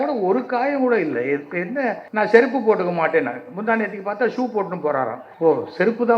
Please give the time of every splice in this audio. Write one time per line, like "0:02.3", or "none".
0:02.0
0:05.2